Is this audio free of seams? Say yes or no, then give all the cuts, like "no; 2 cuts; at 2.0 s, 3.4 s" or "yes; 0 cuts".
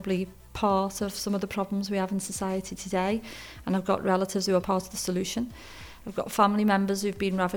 no; 1 cut; at 4.6 s